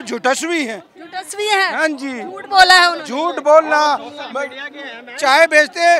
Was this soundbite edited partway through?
no; 0 cuts

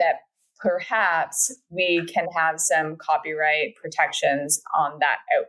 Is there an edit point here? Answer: no; 0 cuts

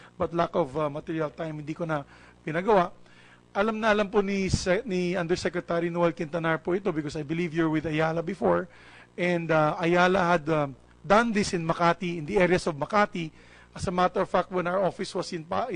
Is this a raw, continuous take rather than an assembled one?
no; 1 cut; at 13.7 s

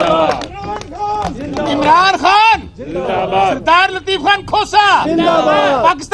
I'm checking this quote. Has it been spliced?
no; 0 cuts

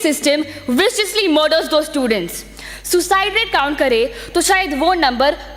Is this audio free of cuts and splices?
yes; 0 cuts

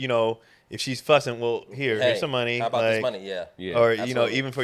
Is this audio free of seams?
yes; 0 cuts

